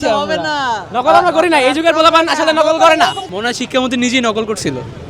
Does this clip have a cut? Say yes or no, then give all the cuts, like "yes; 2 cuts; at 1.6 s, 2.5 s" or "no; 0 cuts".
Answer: yes; 1 cut; at 3.3 s